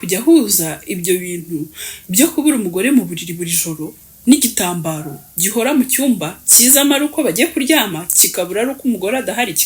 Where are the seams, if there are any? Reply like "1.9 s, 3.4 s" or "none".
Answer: none